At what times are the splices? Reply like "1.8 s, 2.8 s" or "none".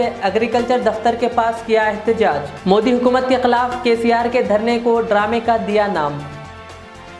none